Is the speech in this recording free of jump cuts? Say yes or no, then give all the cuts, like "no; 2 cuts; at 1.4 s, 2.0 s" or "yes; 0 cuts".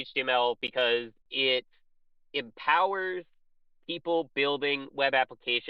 yes; 0 cuts